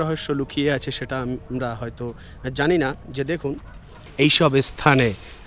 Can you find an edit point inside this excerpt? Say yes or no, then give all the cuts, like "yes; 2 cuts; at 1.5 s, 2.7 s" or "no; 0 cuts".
yes; 1 cut; at 4.0 s